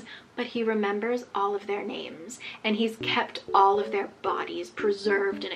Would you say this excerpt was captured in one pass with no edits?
yes; 0 cuts

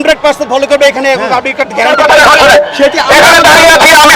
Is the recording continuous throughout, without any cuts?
no; 1 cut; at 1.9 s

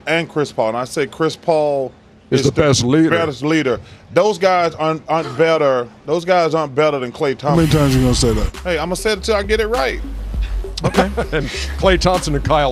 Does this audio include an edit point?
yes; 1 cut; at 4.7 s

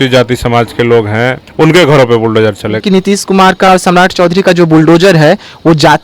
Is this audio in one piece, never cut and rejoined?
no; 2 cuts; at 1.4 s, 2.8 s

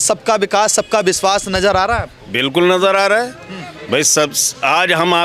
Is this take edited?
no; 0 cuts

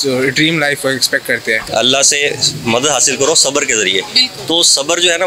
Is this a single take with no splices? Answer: no; 1 cut; at 1.6 s

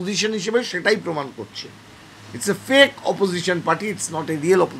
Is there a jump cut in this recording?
no; 0 cuts

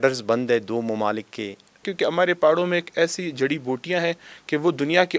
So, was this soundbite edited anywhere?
yes; 1 cut; at 1.9 s

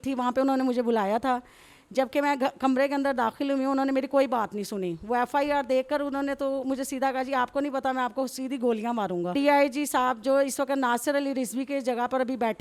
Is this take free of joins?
yes; 0 cuts

